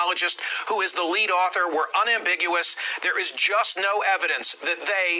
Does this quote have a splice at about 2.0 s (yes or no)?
yes